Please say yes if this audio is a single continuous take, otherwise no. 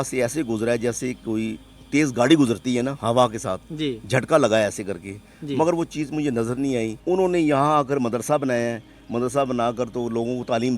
no